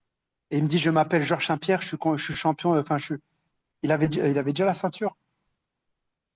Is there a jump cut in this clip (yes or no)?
no